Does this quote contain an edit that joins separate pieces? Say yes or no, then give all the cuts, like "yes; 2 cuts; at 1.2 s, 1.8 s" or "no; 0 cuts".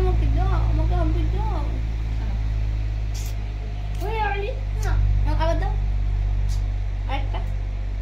no; 0 cuts